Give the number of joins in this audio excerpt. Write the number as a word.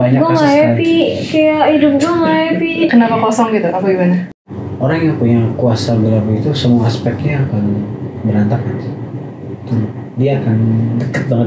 one